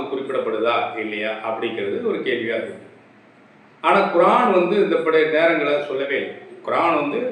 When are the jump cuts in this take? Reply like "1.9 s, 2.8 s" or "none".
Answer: none